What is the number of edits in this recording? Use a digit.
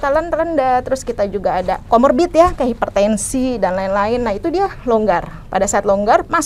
0